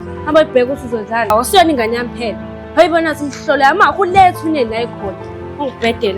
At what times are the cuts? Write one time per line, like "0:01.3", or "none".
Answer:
0:01.3